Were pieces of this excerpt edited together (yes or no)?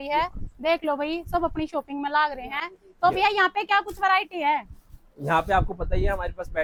no